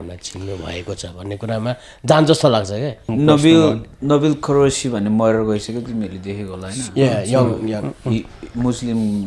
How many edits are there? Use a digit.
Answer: 1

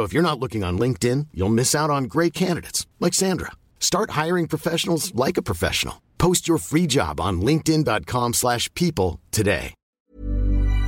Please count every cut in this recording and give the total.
1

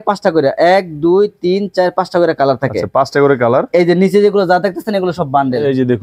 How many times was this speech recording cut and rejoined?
0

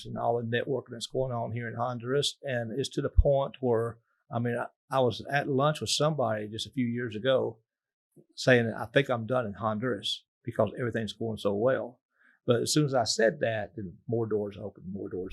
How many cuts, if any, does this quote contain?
0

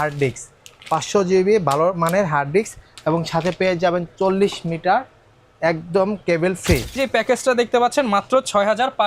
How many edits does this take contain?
1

